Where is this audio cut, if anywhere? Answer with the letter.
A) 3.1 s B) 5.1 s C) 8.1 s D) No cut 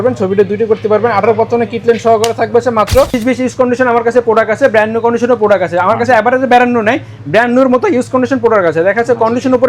A